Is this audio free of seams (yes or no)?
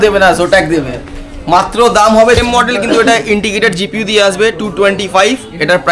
no